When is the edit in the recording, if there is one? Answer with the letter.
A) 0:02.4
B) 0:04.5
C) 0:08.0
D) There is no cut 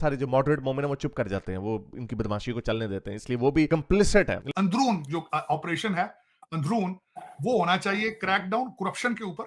B